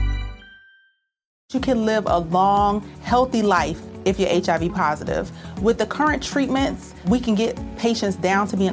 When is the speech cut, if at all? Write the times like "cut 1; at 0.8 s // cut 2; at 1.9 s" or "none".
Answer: cut 1; at 1.4 s